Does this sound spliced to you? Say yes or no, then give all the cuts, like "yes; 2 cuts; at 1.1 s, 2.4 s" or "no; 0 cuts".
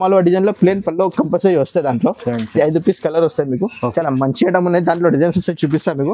no; 0 cuts